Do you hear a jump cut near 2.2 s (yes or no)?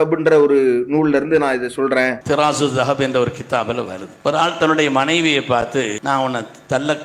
yes